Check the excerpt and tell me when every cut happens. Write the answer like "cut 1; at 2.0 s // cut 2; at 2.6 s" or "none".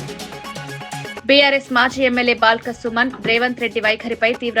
cut 1; at 1.2 s